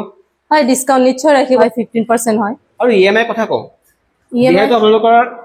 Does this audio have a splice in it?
yes; 2 cuts; at 1.6 s, 2.6 s

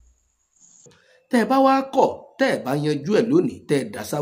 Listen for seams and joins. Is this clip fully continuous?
no; 1 cut; at 1.0 s

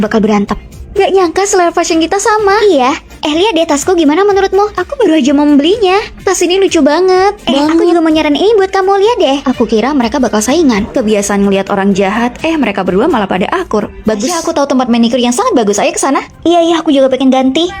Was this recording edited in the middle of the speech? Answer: yes; 1 cut; at 14.4 s

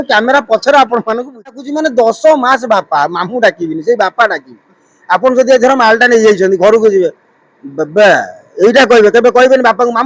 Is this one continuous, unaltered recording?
no; 1 cut; at 1.6 s

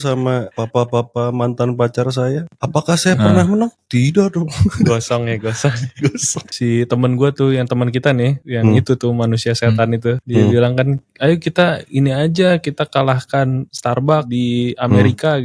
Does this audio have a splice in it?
yes; 1 cut; at 6.5 s

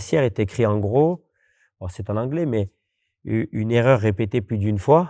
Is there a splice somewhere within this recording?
no; 0 cuts

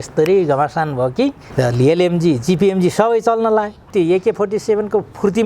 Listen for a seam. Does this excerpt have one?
yes; 2 cuts; at 1.4 s, 3.9 s

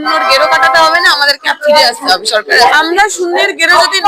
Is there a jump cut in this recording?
yes; 1 cut; at 2.6 s

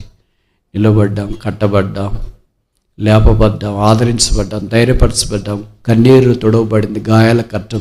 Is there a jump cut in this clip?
no; 0 cuts

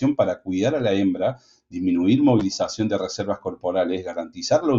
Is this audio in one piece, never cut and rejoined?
yes; 0 cuts

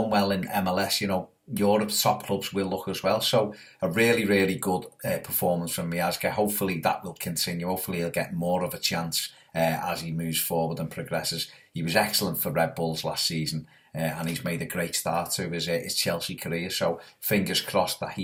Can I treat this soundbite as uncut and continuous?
yes; 0 cuts

